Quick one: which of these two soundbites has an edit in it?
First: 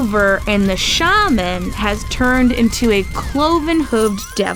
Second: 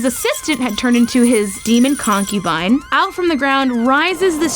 second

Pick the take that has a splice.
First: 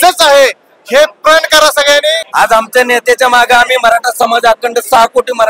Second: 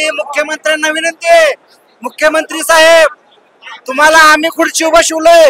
first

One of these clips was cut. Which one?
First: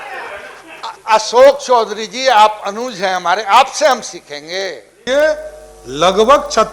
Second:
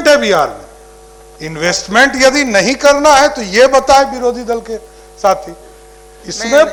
first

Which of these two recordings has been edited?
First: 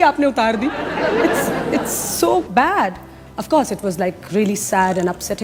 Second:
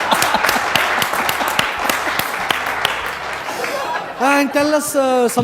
second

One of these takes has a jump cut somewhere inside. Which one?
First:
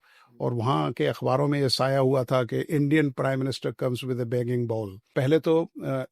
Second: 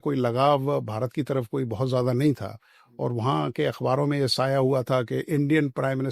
first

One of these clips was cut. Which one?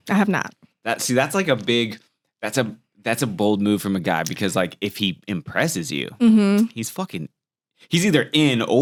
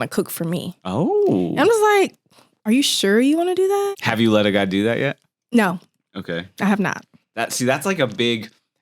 second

